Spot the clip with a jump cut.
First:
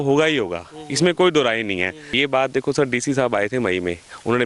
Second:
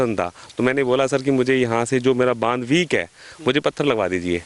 first; 1 cut; at 2.1 s

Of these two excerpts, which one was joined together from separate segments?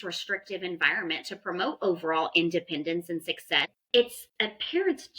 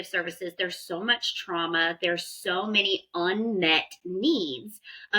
first; 1 cut; at 3.8 s

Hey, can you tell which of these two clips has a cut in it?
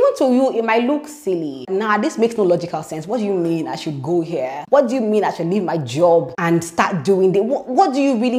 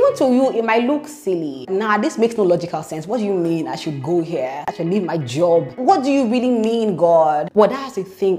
second; 2 cuts; at 4.7 s, 5.8 s

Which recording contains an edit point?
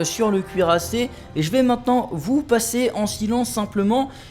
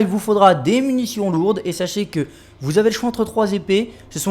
second; 1 cut; at 1.8 s

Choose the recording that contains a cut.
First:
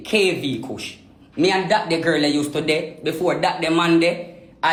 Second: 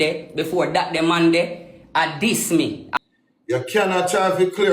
second; 1 cut; at 3.0 s

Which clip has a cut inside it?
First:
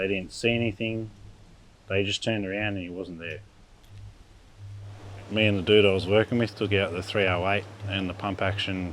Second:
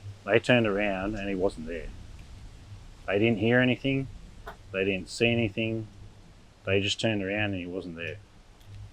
first; 1 cut; at 5.1 s

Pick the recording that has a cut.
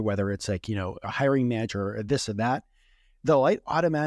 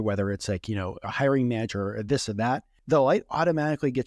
second; 1 cut; at 2.7 s

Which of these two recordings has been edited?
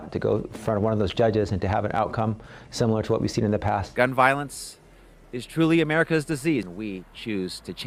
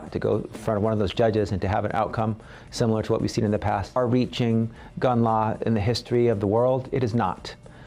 second; 1 cut; at 3.9 s

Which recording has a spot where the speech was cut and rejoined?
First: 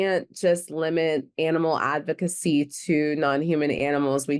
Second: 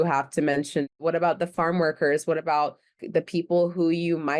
second; 2 cuts; at 0.9 s, 3.0 s

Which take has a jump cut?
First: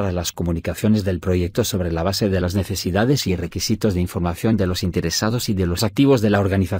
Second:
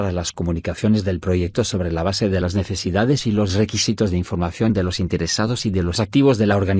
first; 1 cut; at 3.3 s

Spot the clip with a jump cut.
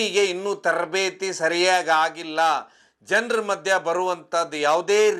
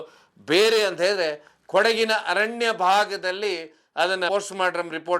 second; 1 cut; at 4.3 s

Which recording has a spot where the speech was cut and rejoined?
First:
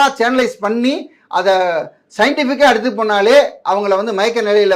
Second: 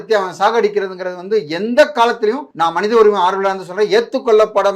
second; 1 cut; at 2.5 s

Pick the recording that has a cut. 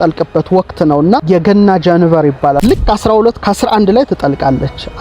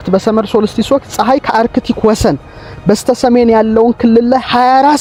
first; 2 cuts; at 1.2 s, 2.6 s

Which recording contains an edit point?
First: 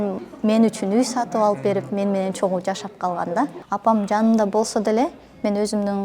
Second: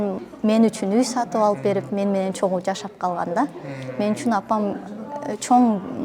first; 1 cut; at 3.6 s

